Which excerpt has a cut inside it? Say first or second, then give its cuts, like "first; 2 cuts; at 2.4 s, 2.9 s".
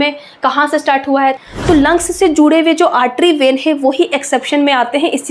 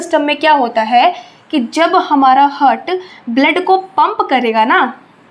first; 1 cut; at 1.4 s